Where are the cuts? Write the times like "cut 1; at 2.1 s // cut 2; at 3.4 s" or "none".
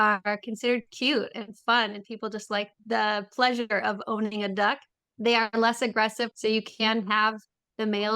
cut 1; at 2.7 s // cut 2; at 6.3 s